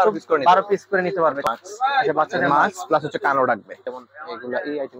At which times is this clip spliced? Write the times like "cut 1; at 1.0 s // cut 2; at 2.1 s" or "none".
cut 1; at 1.5 s // cut 2; at 3.8 s